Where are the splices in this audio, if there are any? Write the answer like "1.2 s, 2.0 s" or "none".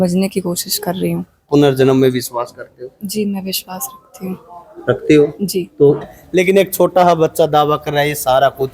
1.5 s, 6.0 s